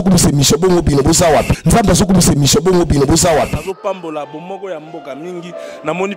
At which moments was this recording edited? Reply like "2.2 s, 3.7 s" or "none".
1.4 s